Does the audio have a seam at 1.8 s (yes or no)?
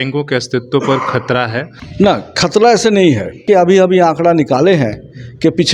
yes